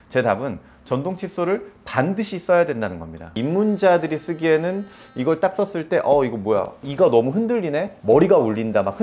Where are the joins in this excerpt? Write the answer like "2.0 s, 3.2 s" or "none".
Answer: 3.2 s